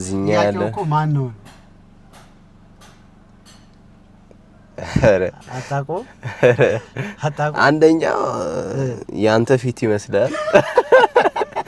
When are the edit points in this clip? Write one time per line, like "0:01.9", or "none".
none